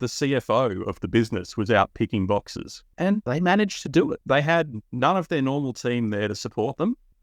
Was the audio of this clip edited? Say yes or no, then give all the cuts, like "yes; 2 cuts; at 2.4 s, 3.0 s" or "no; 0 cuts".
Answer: yes; 2 cuts; at 3.1 s, 4.2 s